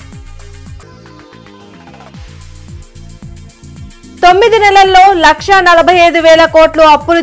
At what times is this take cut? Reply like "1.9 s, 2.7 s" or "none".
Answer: 4.1 s